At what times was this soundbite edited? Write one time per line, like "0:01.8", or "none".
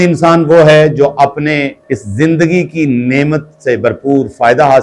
none